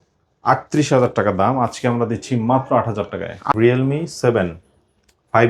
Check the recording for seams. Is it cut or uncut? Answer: cut